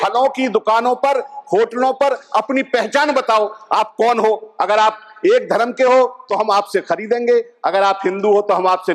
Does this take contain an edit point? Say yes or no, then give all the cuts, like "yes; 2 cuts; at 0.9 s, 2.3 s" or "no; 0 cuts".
no; 0 cuts